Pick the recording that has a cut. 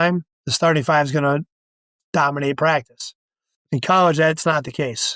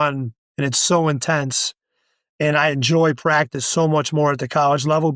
first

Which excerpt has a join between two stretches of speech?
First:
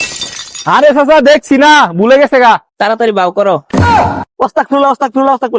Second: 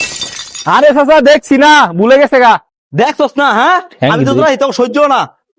first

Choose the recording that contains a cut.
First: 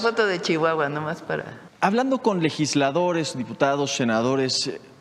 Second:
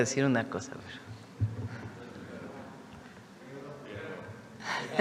first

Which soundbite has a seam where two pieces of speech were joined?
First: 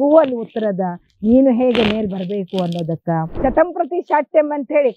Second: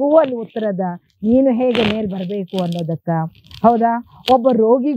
first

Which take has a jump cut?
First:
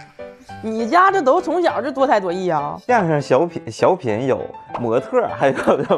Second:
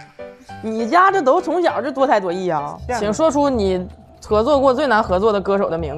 second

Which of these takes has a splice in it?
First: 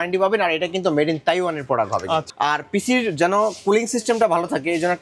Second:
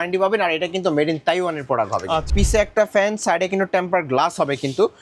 second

